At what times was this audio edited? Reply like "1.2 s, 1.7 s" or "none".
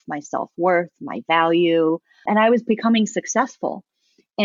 2.2 s

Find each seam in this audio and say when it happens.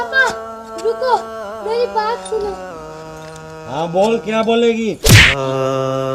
none

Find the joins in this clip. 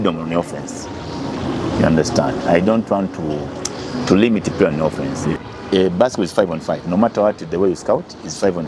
5.3 s

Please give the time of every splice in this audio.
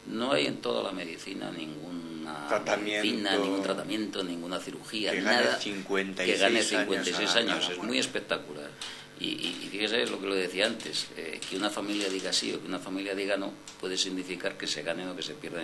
none

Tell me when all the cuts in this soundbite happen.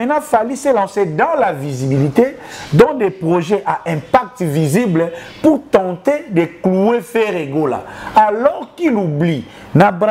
none

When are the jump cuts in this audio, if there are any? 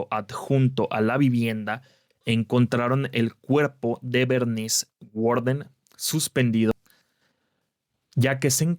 6.7 s

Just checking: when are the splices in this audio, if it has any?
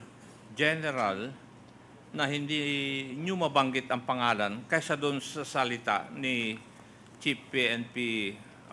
none

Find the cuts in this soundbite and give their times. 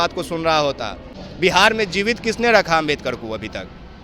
1.1 s

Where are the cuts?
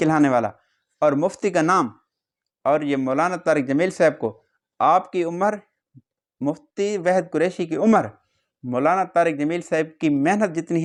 none

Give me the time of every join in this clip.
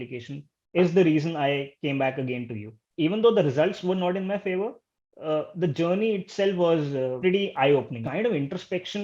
2.8 s, 7.1 s, 8.0 s

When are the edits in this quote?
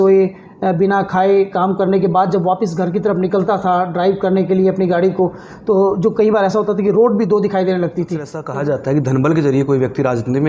8.4 s

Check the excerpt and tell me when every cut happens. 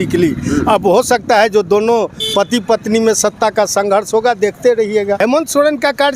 5.2 s

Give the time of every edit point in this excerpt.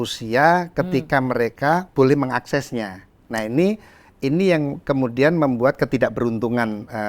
1.9 s

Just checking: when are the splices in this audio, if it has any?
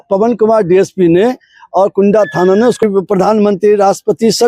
2.8 s

